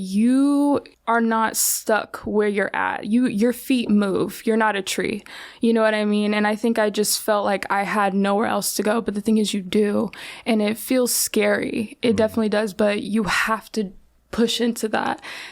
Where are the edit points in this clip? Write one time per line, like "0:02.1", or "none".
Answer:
0:00.9